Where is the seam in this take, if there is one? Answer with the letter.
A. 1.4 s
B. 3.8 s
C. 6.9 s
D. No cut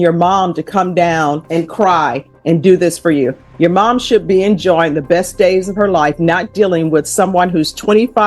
A